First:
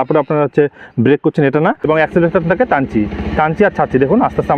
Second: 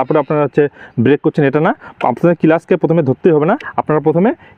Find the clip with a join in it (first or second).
first